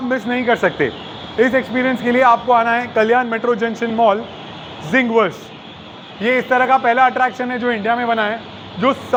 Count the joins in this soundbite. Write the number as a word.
zero